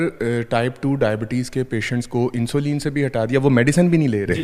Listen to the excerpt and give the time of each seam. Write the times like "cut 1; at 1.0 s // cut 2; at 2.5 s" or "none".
none